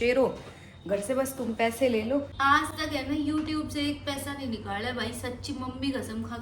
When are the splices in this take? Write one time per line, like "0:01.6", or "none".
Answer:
0:02.3